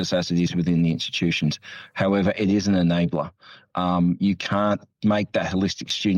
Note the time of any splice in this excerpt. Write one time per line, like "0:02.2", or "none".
0:04.9